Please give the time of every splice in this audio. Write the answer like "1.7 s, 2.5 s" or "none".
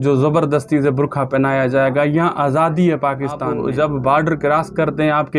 3.5 s